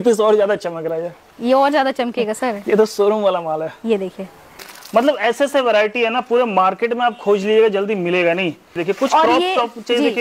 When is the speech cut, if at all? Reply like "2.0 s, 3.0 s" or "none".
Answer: 4.7 s, 8.8 s